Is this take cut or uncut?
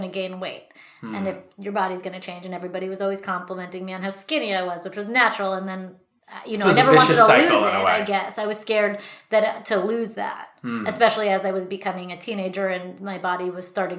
uncut